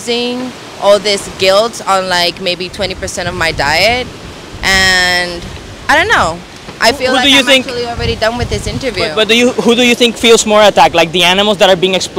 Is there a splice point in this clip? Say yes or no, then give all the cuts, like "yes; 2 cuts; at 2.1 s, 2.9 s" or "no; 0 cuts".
no; 0 cuts